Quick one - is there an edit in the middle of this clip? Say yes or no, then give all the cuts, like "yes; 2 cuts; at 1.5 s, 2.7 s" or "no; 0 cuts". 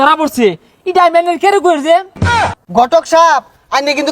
yes; 1 cut; at 2.3 s